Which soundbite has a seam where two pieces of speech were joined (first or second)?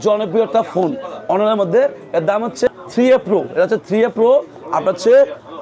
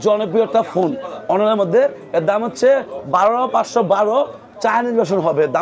first